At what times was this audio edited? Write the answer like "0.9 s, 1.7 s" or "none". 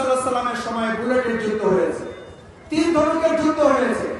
none

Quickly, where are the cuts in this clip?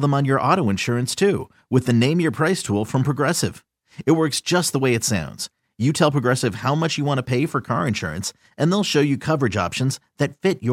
none

